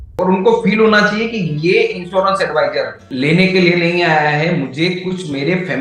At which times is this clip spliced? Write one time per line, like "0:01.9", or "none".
0:03.0